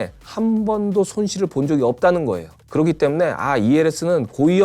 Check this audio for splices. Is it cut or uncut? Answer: cut